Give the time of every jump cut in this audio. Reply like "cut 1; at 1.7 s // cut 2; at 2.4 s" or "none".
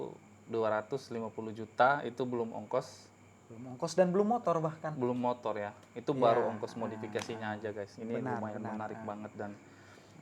none